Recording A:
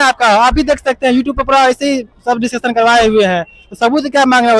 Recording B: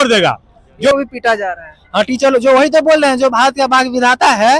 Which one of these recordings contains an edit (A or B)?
B